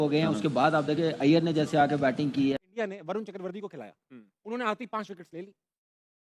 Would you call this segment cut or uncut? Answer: cut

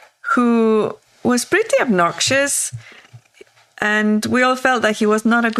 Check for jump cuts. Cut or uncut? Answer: uncut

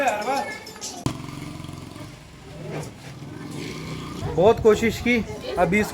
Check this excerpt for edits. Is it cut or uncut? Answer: cut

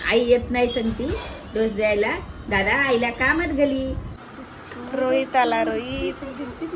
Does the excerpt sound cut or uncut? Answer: cut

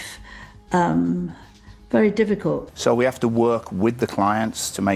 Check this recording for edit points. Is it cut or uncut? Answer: cut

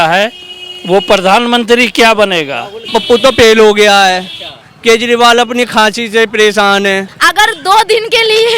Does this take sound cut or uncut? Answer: cut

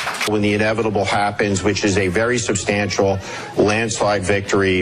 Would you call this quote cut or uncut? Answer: uncut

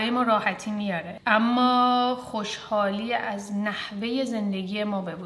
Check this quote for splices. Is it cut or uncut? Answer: cut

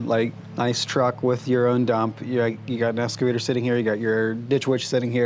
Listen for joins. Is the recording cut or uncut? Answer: uncut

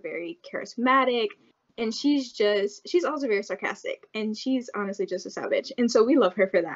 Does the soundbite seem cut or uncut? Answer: cut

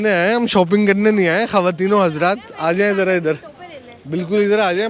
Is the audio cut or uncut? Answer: uncut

